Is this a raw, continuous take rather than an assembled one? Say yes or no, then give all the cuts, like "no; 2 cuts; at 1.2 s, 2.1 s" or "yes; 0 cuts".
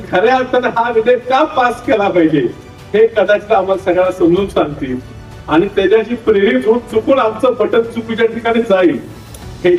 yes; 0 cuts